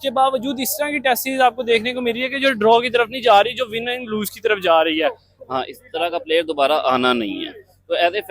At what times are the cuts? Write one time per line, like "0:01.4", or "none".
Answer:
0:05.3